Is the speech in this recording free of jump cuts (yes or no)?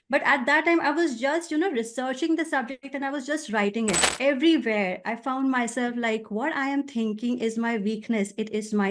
no